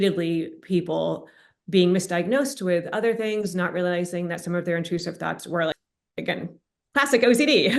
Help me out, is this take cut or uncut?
uncut